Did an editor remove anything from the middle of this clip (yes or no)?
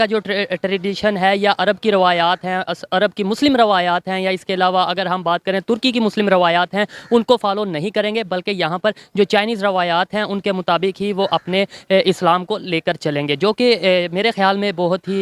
no